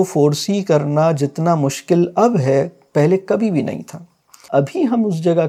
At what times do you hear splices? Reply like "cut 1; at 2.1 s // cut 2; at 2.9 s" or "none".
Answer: cut 1; at 4.4 s